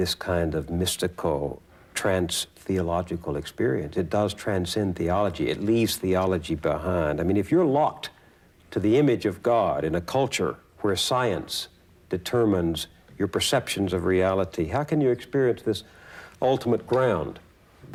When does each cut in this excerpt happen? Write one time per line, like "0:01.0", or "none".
none